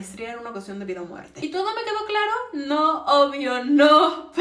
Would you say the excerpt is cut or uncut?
cut